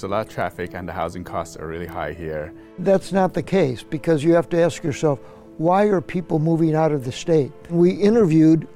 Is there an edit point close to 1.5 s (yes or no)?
no